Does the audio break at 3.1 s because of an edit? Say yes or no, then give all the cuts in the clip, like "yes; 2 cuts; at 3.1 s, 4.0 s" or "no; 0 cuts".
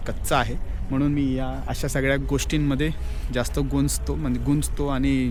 no; 0 cuts